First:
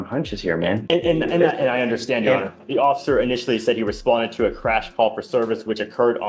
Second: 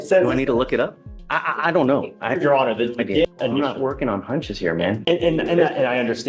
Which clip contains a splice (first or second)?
second